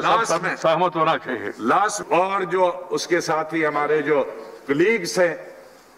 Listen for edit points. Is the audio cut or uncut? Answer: cut